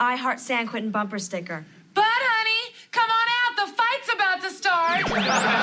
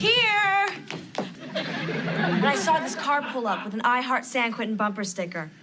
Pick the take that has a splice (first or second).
second